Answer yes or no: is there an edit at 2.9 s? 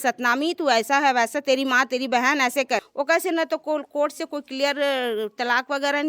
yes